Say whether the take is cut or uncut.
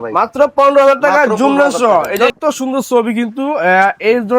cut